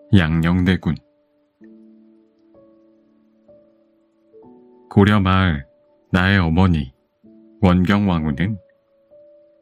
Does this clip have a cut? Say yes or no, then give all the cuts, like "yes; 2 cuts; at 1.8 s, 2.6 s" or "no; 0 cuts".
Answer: yes; 2 cuts; at 1.7 s, 4.9 s